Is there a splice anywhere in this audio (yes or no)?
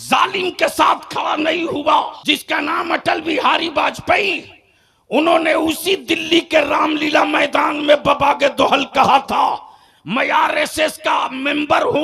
yes